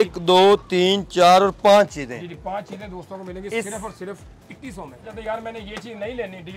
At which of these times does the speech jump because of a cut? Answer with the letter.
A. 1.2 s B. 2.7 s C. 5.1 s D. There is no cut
C